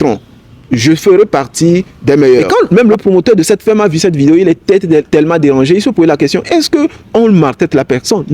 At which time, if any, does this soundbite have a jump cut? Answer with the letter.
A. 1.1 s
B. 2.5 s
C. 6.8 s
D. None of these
B